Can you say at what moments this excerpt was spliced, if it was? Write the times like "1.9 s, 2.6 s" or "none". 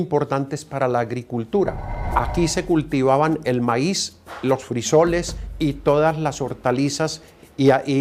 none